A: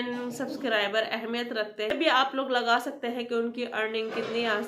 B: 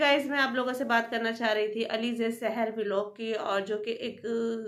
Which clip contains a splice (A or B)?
A